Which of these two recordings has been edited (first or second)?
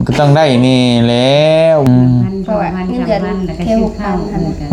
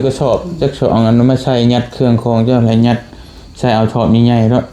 first